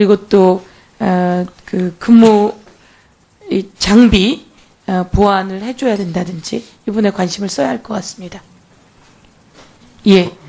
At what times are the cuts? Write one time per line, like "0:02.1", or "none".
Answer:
0:03.7